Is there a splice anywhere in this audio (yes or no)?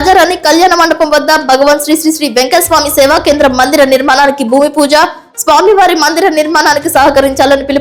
no